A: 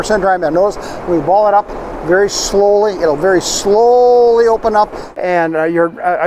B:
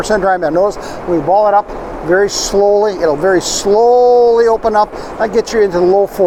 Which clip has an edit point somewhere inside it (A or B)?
A